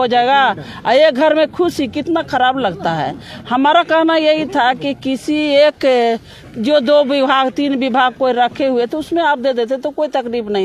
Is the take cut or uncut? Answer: uncut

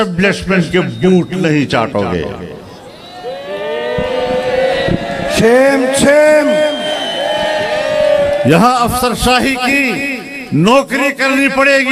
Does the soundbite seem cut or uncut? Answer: uncut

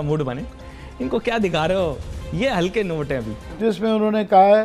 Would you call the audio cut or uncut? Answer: cut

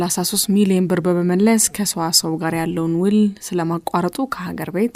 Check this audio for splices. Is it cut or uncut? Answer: uncut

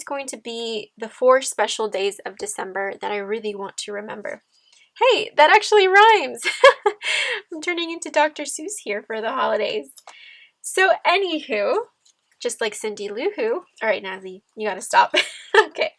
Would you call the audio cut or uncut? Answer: uncut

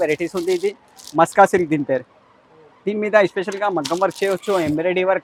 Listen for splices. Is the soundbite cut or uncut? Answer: uncut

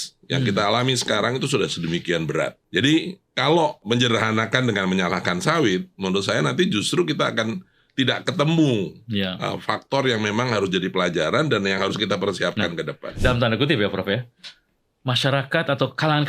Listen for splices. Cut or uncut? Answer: cut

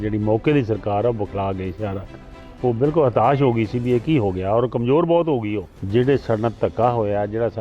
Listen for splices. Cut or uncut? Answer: cut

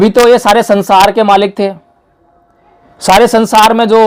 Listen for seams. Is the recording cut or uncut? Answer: uncut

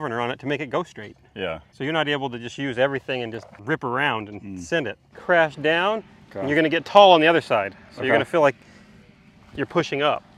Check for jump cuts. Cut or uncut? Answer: cut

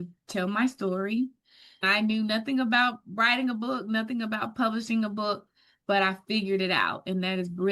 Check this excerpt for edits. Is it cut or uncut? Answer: cut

